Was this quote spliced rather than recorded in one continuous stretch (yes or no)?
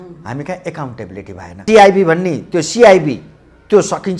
yes